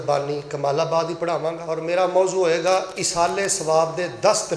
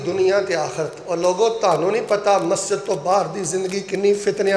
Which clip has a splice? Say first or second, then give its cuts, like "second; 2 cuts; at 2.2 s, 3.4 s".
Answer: first; 1 cut; at 1.7 s